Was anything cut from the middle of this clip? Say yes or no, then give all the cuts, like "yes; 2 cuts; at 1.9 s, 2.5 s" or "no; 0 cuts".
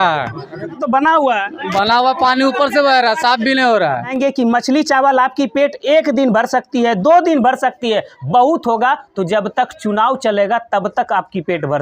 yes; 2 cuts; at 0.8 s, 4.1 s